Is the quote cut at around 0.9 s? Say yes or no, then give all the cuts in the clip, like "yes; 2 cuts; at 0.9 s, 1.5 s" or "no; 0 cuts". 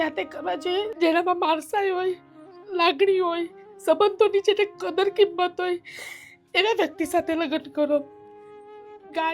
yes; 1 cut; at 0.9 s